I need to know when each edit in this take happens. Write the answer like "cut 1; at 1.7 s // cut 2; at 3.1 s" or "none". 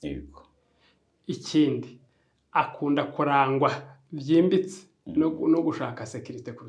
none